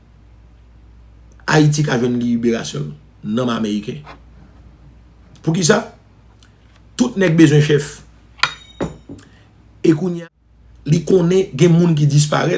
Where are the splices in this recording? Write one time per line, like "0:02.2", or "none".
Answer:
0:10.2